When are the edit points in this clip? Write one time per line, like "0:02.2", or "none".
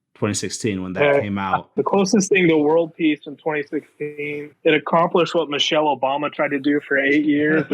0:01.7